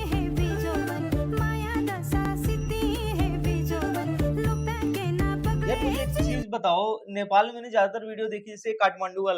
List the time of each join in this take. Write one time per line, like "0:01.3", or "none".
none